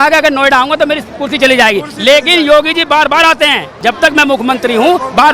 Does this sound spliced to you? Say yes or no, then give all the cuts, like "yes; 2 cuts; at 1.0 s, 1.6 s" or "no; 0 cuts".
yes; 1 cut; at 3.7 s